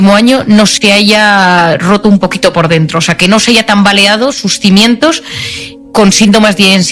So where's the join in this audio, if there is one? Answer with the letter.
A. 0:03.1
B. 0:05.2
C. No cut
C